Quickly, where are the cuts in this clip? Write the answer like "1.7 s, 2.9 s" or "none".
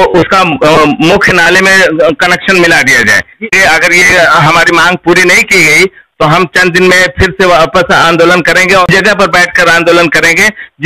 3.5 s, 8.8 s

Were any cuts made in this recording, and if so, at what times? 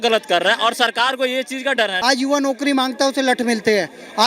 2.0 s

